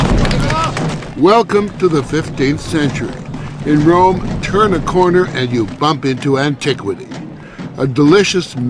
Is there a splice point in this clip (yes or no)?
yes